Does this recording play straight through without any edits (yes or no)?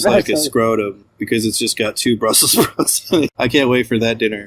no